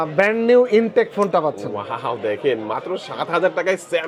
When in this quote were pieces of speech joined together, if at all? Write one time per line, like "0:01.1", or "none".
none